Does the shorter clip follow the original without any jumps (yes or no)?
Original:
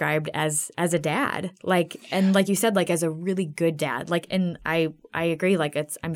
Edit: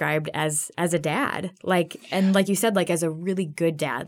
yes